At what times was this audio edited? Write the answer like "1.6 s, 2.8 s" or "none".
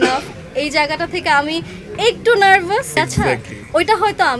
2.9 s